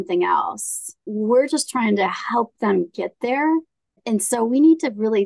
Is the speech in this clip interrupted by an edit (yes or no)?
yes